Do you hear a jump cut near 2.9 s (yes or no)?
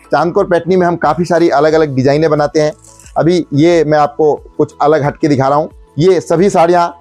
no